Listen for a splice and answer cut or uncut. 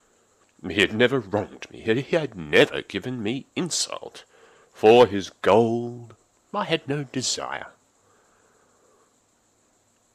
cut